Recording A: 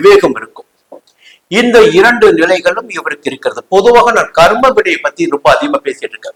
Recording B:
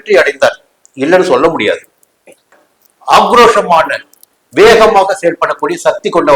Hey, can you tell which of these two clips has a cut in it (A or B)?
B